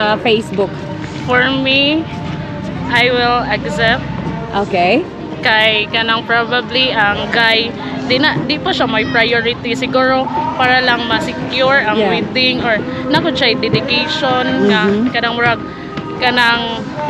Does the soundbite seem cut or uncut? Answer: uncut